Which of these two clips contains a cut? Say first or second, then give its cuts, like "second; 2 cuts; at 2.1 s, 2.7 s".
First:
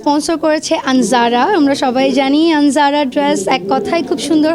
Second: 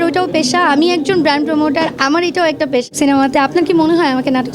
second; 1 cut; at 2.9 s